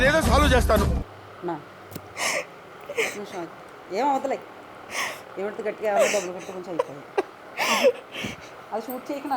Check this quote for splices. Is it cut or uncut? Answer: uncut